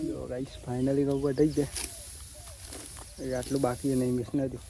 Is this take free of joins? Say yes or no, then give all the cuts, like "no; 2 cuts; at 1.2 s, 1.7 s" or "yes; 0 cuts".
yes; 0 cuts